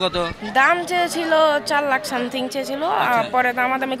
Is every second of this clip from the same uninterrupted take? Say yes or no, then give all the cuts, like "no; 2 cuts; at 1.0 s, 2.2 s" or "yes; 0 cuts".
yes; 0 cuts